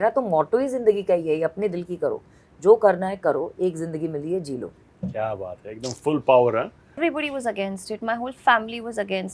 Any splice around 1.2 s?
no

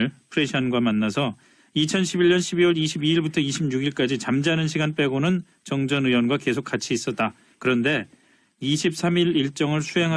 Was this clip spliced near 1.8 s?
no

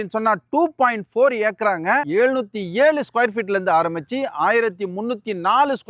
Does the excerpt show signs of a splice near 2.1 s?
yes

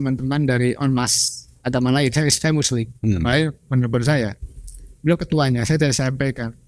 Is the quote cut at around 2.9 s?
no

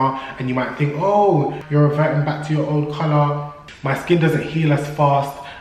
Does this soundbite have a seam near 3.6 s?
yes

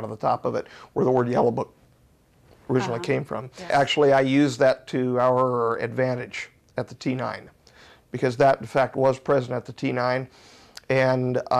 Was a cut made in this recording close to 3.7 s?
yes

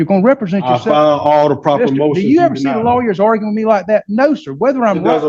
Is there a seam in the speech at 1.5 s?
no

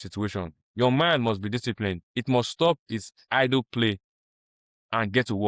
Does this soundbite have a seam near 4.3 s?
no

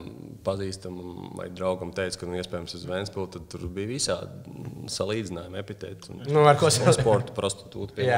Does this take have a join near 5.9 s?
no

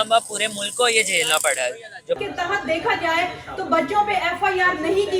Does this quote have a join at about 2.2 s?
yes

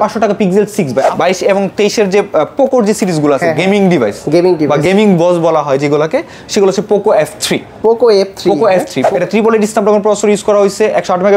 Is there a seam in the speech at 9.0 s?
yes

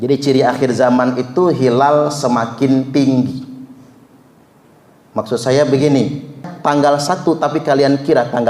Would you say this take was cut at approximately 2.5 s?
no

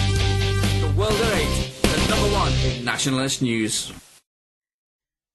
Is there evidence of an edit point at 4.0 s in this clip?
yes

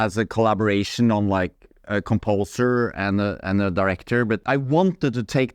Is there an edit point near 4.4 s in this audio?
yes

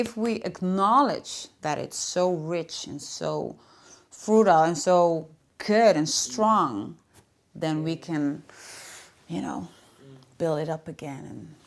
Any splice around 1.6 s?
yes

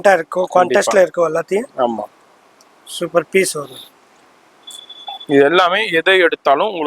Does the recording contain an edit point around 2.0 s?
no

